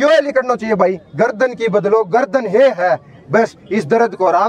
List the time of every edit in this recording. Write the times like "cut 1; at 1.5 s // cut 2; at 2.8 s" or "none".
none